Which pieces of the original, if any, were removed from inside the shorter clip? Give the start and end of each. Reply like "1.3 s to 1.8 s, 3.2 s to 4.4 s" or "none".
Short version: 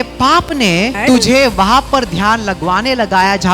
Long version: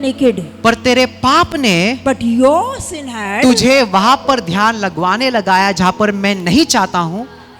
2.0 s to 3.3 s